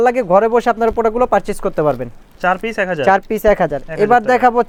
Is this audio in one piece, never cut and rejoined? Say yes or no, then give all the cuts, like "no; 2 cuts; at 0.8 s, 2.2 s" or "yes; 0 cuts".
yes; 0 cuts